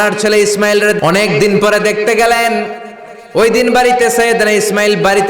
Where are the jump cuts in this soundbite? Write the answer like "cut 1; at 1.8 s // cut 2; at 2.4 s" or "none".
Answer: cut 1; at 1.0 s